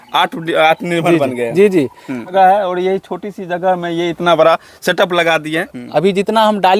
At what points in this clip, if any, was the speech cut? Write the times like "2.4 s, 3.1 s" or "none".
2.3 s, 5.7 s